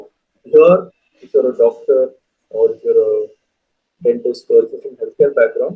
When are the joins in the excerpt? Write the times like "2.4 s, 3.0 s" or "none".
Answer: none

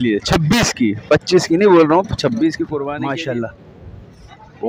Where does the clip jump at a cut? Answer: 2.9 s

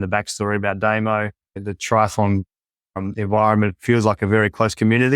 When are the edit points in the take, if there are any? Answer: 1.5 s

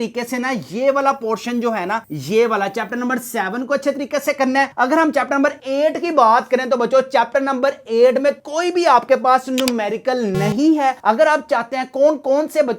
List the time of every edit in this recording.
none

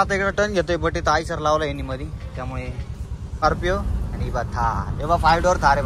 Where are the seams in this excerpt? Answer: 3.4 s

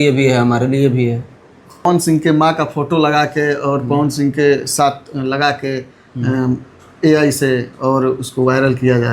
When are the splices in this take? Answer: 1.9 s

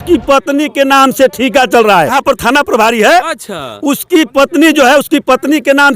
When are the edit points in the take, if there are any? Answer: 2.2 s

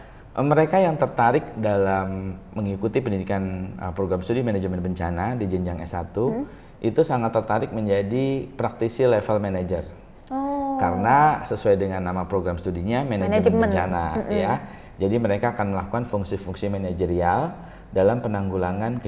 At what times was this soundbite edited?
none

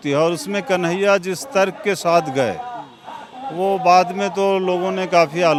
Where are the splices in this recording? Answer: none

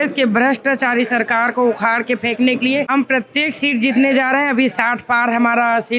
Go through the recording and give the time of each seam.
2.9 s

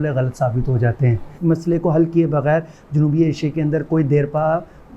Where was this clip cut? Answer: 1.4 s

